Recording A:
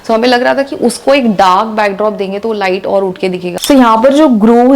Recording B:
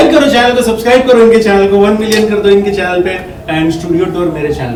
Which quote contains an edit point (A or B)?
A